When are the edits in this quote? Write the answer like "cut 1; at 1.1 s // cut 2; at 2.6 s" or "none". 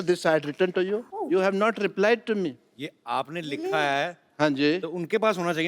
cut 1; at 1.1 s